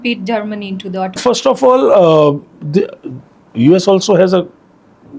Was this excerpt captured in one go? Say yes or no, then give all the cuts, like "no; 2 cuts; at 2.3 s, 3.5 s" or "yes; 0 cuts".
no; 1 cut; at 1.1 s